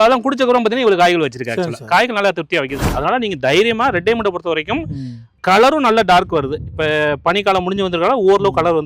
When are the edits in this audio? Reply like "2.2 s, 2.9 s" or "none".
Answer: 2.8 s, 5.4 s